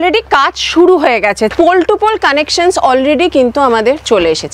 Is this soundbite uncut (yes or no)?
no